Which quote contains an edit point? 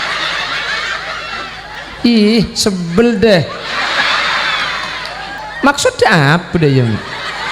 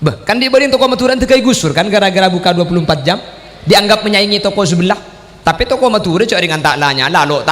first; 2 cuts; at 1.8 s, 5.4 s

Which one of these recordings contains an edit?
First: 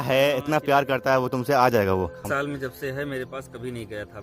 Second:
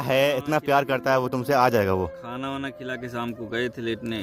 first; 1 cut; at 2.2 s

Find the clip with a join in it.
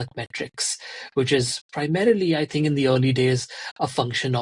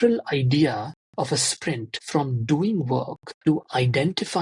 second; 2 cuts; at 1.9 s, 3.2 s

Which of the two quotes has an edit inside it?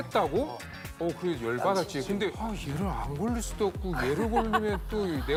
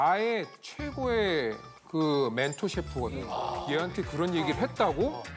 second; 1 cut; at 3.6 s

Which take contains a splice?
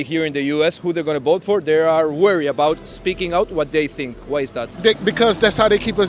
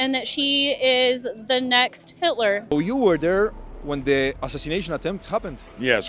second; 1 cut; at 2.7 s

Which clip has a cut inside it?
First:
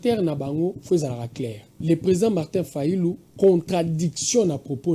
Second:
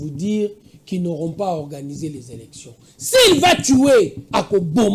first; 1 cut; at 1.7 s

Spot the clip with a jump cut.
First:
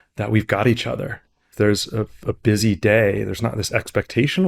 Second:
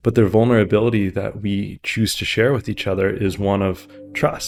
first; 1 cut; at 1.5 s

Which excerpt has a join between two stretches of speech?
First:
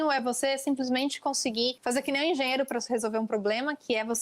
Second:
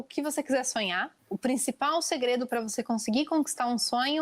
first; 1 cut; at 1.8 s

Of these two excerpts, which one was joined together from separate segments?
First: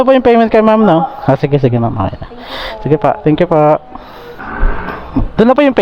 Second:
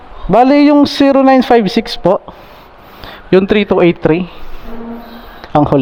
first; 1 cut; at 4.5 s

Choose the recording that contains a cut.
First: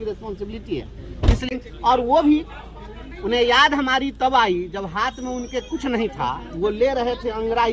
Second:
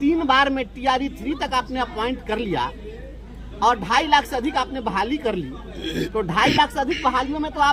first; 1 cut; at 1.5 s

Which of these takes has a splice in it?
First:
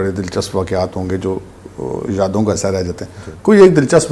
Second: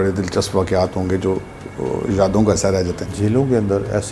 second; 1 cut; at 3.1 s

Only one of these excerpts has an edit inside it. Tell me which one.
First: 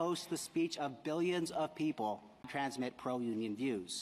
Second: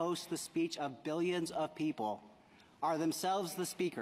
second; 1 cut; at 2.5 s

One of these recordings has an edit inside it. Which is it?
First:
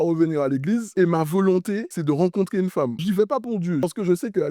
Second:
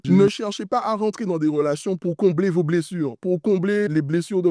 first; 2 cuts; at 0.9 s, 3.8 s

